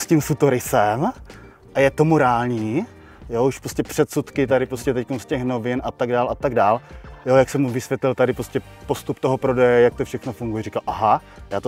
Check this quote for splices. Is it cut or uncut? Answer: uncut